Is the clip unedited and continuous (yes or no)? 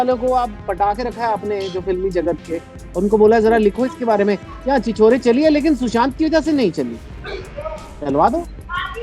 yes